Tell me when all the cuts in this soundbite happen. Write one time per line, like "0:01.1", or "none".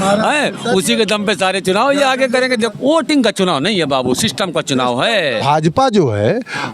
0:02.7
0:05.4